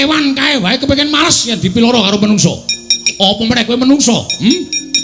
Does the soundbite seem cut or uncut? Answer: uncut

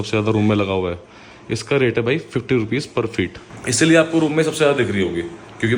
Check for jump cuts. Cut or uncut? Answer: uncut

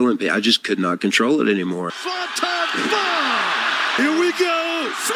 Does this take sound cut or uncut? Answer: uncut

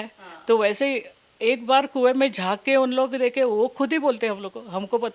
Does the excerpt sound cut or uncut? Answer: uncut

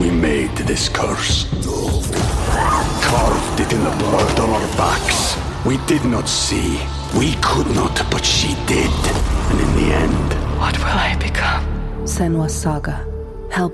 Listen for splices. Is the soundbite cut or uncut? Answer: uncut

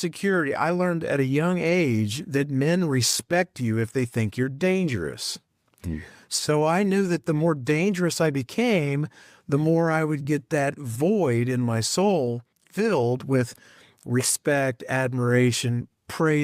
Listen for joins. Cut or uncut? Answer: uncut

